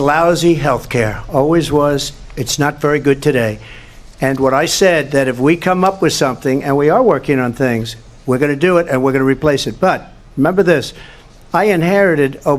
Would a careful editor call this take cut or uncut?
uncut